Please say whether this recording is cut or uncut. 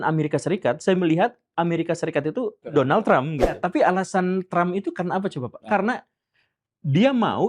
cut